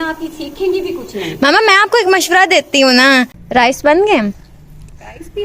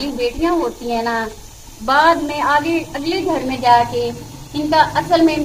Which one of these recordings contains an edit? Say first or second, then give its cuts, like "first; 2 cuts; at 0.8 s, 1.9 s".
first; 1 cut; at 3.4 s